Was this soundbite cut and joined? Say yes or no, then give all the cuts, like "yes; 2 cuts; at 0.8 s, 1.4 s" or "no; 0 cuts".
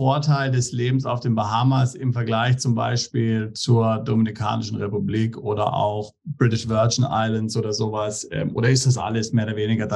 no; 0 cuts